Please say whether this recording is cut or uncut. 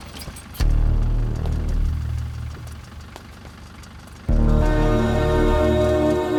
uncut